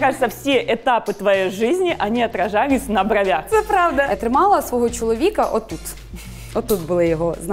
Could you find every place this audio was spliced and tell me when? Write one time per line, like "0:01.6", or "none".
0:04.1